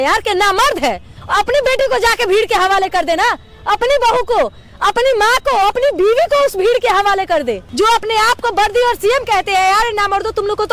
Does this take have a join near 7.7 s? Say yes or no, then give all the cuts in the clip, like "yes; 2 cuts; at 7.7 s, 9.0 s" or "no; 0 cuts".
yes; 2 cuts; at 1.1 s, 7.7 s